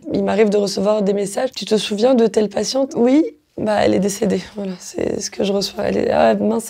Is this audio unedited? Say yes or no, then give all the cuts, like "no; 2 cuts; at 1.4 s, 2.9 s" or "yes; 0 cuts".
no; 1 cut; at 2.9 s